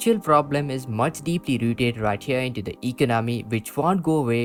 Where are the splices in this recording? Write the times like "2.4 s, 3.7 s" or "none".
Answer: none